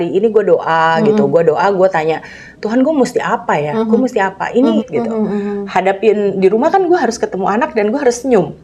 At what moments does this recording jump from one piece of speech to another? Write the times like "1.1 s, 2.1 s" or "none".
4.8 s